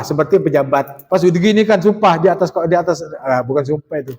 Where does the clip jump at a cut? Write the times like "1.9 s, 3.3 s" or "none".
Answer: 1.0 s